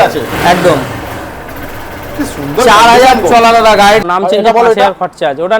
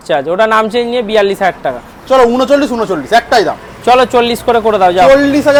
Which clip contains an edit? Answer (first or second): first